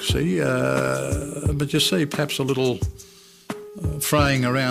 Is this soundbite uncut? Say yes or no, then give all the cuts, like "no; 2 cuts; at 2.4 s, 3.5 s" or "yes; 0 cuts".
no; 1 cut; at 3.6 s